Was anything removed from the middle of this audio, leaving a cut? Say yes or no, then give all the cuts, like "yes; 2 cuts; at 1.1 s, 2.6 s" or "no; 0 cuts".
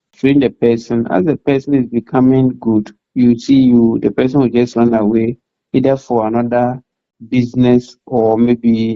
no; 0 cuts